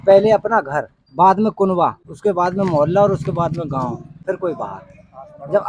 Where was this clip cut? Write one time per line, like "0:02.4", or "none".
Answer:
0:01.0
0:02.1
0:04.1